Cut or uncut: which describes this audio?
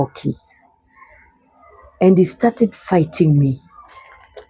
uncut